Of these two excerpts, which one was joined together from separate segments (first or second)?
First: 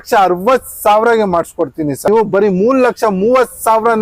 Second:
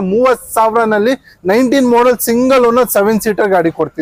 first